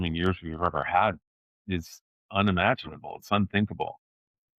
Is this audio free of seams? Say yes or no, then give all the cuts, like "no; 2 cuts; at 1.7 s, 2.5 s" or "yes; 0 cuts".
yes; 0 cuts